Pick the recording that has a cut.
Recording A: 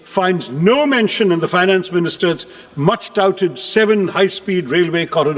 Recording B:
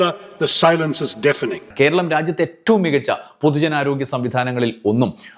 B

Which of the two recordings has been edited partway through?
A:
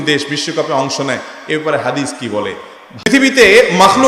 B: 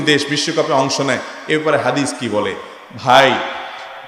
A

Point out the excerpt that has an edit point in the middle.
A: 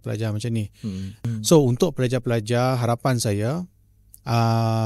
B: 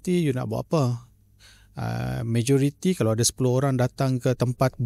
A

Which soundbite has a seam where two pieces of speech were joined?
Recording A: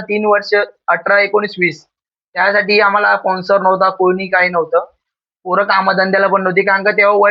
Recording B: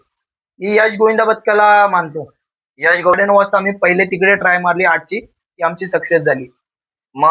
B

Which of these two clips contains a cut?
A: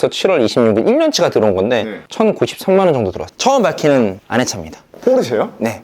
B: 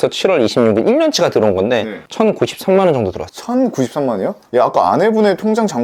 A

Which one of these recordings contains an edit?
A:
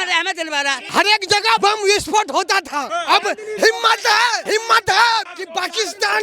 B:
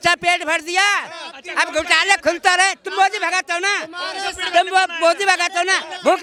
A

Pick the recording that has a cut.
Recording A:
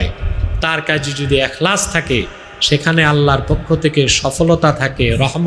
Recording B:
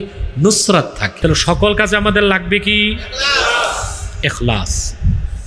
B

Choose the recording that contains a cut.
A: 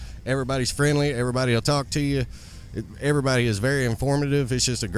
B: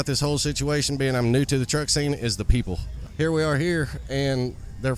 B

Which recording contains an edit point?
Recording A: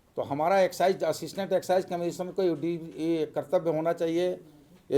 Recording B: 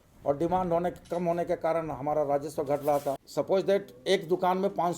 B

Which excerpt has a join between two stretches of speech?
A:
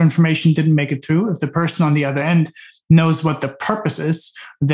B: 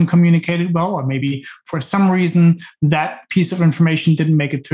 B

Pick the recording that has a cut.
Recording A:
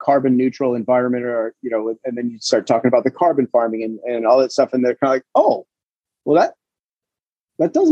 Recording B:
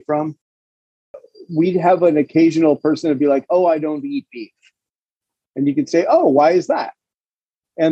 B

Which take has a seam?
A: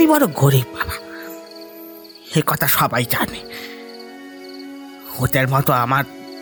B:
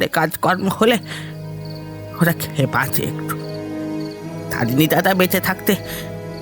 B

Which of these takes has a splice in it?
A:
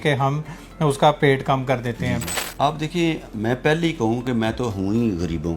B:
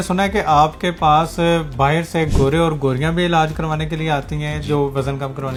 A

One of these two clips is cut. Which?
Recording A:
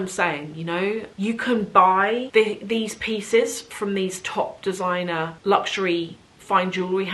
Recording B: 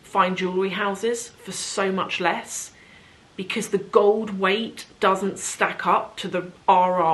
A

